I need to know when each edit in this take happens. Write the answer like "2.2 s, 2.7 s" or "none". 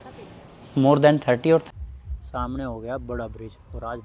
1.7 s